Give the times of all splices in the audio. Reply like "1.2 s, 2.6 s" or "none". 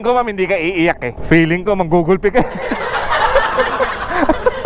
none